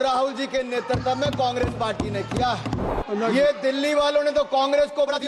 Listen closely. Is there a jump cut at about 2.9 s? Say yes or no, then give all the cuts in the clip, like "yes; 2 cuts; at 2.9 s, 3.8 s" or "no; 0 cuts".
yes; 1 cut; at 2.9 s